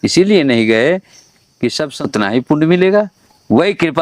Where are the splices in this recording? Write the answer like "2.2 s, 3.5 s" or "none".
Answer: 2.0 s